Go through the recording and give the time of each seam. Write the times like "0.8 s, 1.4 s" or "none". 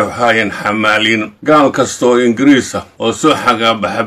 1.3 s, 3.2 s